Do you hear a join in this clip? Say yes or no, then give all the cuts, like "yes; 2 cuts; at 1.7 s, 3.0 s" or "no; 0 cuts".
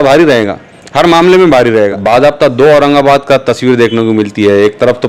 yes; 1 cut; at 2.0 s